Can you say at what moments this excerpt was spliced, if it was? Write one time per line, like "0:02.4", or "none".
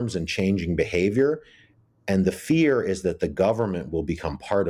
none